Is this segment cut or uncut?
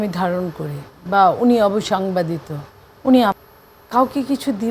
cut